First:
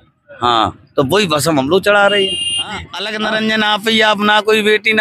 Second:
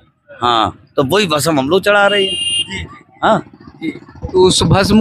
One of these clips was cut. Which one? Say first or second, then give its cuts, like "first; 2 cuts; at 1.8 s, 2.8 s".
first; 1 cut; at 3.0 s